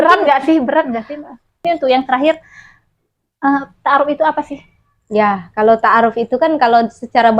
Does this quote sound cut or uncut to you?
cut